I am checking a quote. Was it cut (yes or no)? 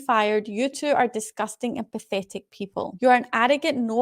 yes